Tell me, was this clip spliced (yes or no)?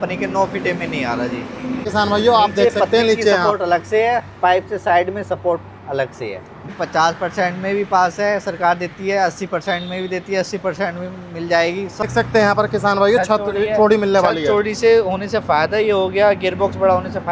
yes